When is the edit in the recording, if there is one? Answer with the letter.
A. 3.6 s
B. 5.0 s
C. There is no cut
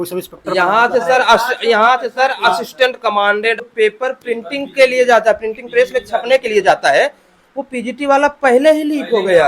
A